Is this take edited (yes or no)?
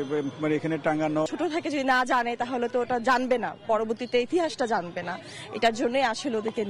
yes